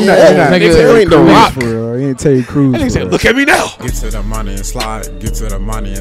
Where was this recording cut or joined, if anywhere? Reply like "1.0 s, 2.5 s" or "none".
3.8 s